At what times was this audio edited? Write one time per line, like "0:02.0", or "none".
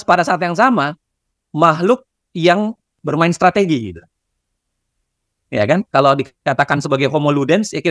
0:03.0